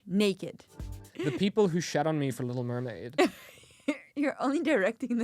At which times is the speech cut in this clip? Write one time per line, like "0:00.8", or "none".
0:01.1